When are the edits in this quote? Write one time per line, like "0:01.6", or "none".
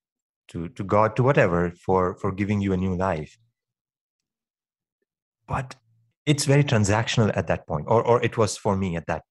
0:06.1